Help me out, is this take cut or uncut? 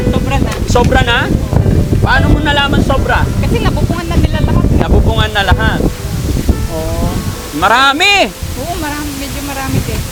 uncut